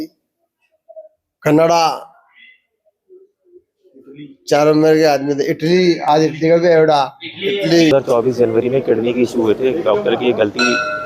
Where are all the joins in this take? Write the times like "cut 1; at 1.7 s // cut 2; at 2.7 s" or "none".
cut 1; at 7.9 s